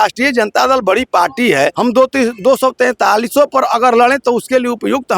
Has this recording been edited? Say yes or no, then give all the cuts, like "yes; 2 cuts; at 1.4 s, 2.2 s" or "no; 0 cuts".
yes; 1 cut; at 1.7 s